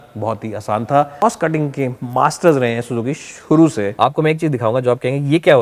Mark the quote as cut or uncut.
cut